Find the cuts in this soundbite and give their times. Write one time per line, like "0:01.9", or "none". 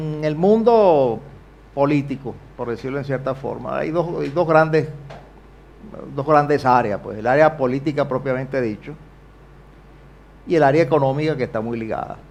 none